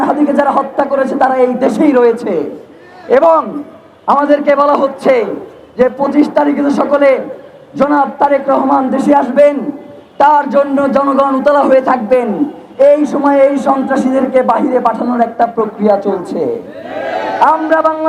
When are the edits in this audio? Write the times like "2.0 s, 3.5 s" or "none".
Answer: none